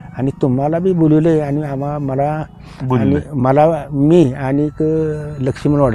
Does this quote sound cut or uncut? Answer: uncut